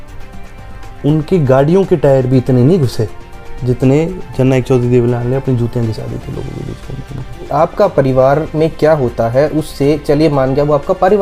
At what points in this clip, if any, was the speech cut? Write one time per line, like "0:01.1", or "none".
0:07.5